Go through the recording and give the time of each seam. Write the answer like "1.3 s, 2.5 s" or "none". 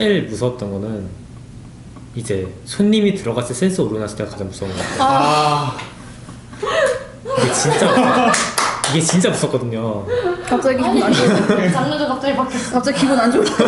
none